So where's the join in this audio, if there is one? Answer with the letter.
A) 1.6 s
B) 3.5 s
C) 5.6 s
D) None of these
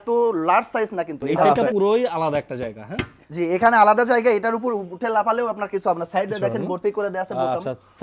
A